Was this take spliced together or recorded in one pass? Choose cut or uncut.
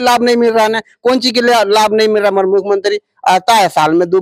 uncut